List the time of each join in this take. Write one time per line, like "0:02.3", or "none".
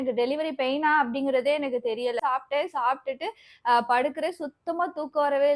0:02.2